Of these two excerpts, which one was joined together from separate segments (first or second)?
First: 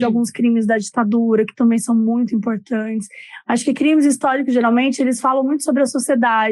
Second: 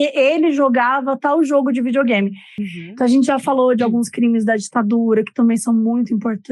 second